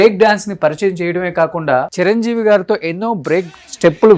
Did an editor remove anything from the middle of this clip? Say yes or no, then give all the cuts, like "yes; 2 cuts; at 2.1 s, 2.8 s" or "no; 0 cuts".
yes; 1 cut; at 1.9 s